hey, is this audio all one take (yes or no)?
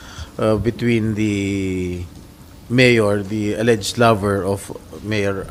yes